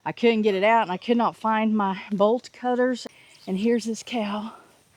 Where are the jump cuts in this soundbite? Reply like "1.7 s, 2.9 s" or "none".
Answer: 3.1 s